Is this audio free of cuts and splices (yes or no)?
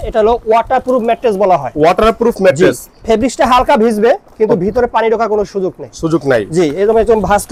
yes